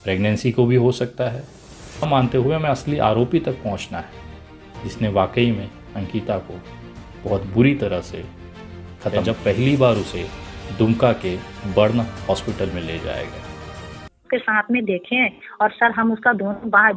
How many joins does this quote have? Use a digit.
2